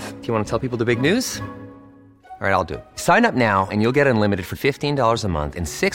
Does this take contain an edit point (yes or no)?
no